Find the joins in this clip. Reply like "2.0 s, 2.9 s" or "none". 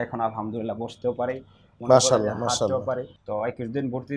3.2 s

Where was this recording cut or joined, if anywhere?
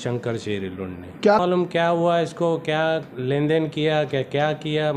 1.4 s

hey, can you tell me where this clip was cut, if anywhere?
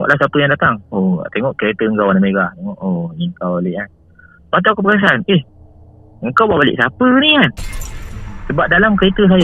none

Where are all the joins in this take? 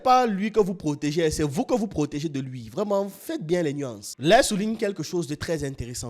4.1 s

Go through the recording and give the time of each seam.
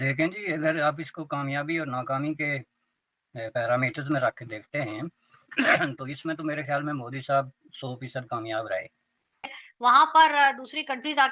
9.5 s

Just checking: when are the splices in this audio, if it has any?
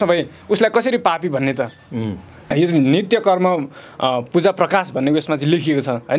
2.3 s

